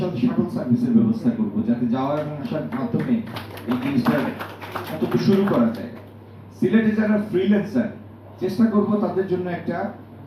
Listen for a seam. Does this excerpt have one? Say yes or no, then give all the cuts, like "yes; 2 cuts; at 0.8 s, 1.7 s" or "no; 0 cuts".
no; 0 cuts